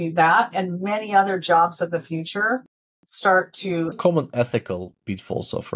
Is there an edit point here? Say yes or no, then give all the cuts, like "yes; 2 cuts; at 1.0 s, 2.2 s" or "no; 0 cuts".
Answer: yes; 1 cut; at 4.0 s